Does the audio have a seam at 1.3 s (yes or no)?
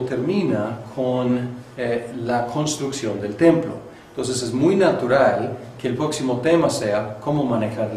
no